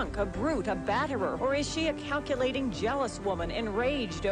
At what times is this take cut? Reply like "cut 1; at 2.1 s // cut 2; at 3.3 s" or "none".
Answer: cut 1; at 1.4 s

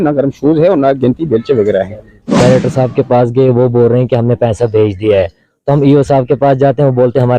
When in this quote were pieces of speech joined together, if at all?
cut 1; at 2.4 s

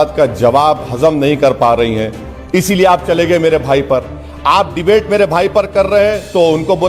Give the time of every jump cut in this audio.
none

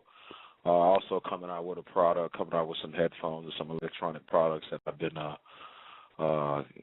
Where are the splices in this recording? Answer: cut 1; at 1.8 s

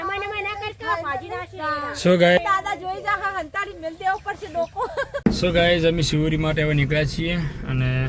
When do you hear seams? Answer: cut 1; at 2.4 s // cut 2; at 5.2 s

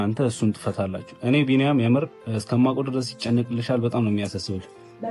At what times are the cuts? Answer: none

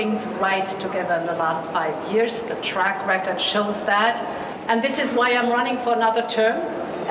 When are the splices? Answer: cut 1; at 4.5 s

